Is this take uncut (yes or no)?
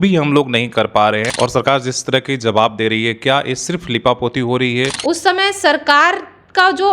no